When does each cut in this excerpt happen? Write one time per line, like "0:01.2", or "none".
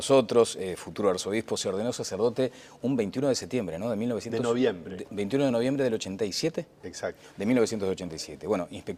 none